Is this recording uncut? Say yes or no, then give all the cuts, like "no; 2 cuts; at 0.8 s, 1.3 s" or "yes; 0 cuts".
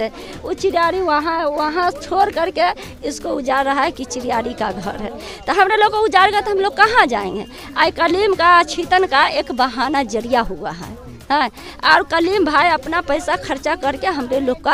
yes; 0 cuts